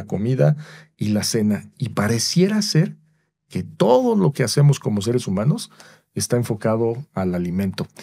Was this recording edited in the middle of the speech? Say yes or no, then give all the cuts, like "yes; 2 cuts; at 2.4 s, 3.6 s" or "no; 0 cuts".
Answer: no; 0 cuts